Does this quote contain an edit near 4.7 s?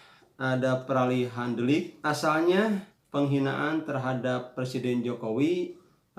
no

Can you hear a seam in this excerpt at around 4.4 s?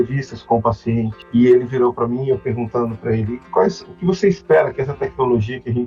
no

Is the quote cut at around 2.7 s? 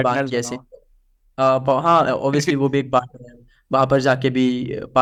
no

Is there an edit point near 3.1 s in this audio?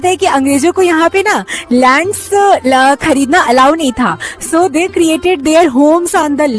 no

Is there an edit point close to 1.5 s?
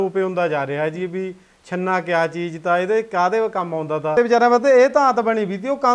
no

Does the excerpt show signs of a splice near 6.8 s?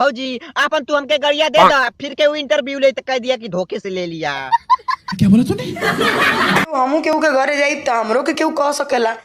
yes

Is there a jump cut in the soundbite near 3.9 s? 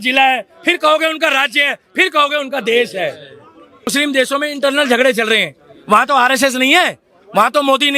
yes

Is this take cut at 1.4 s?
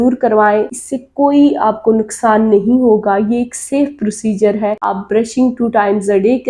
no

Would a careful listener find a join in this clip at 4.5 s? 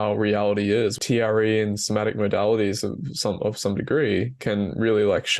no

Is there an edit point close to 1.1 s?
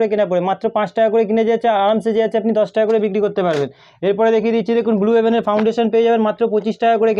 no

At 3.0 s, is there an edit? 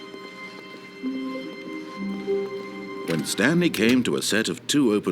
yes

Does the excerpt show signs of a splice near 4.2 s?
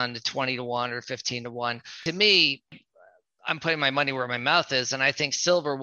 no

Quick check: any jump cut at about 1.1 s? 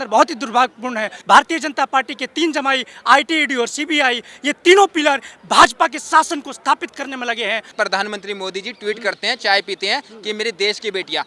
yes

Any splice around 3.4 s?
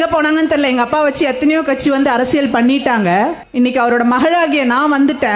yes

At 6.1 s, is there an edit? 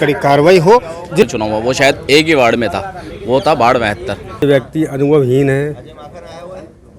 no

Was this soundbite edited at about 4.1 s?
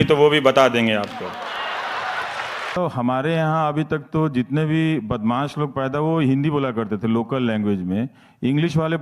no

